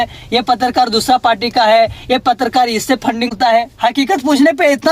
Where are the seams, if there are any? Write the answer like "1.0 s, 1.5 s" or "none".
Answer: none